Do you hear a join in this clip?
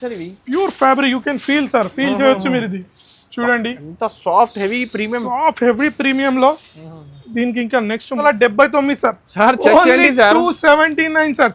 yes; 1 cut; at 8.2 s

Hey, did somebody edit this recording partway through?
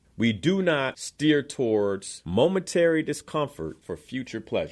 yes; 3 cuts; at 1.0 s, 2.1 s, 3.8 s

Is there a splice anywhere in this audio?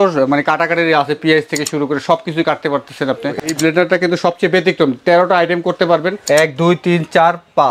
yes; 2 cuts; at 3.5 s, 6.1 s

